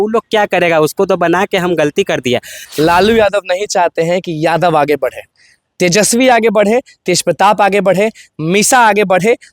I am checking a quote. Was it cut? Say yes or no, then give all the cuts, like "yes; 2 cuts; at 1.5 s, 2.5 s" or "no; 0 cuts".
yes; 1 cut; at 2.6 s